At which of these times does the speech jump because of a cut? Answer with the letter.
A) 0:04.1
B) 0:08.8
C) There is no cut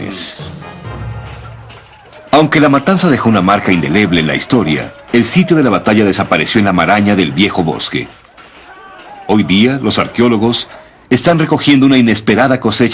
C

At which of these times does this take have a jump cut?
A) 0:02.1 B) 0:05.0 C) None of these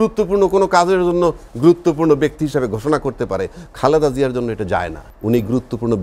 B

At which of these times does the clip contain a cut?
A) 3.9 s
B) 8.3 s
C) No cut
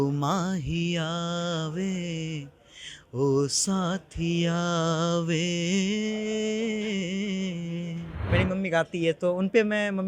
B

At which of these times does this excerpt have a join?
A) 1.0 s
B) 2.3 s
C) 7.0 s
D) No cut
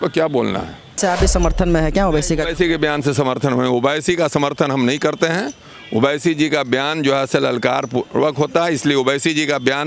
A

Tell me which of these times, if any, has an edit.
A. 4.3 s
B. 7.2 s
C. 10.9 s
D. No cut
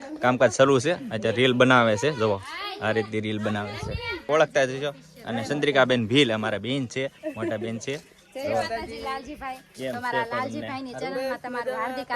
A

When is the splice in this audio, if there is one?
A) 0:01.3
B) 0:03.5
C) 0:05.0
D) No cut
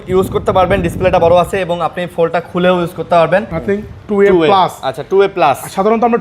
B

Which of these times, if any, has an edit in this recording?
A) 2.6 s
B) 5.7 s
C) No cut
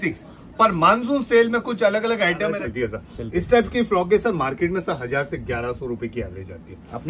A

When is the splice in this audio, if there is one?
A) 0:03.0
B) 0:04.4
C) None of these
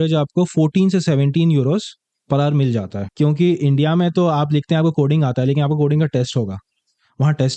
A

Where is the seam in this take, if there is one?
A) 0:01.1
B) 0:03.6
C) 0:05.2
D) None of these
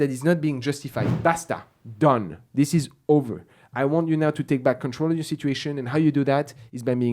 A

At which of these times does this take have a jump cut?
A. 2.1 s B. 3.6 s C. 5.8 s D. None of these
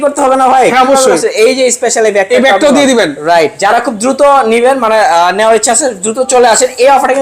B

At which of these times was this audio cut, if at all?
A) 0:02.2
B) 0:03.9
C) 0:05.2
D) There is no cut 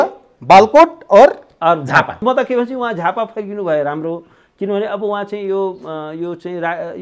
A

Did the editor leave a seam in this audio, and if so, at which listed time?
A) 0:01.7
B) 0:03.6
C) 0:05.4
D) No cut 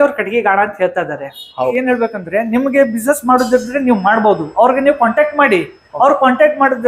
A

